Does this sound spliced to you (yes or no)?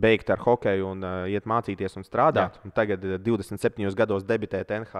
no